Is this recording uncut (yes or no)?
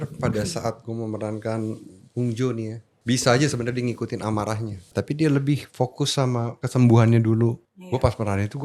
no